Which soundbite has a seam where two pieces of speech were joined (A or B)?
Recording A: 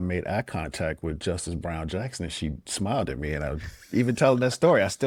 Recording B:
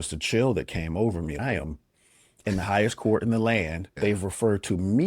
B